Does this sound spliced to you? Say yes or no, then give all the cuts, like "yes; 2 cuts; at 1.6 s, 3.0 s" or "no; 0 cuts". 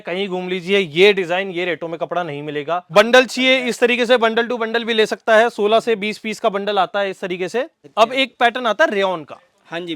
yes; 2 cuts; at 2.9 s, 7.8 s